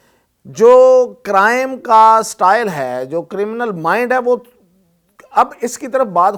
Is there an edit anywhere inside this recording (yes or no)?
no